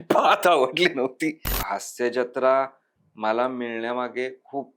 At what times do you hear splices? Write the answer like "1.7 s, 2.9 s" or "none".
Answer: 1.5 s